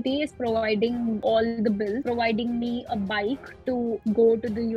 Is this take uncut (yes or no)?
no